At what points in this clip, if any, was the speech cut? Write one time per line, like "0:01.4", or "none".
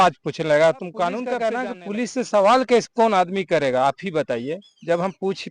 0:01.4